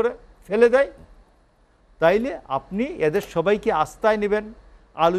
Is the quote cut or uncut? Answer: uncut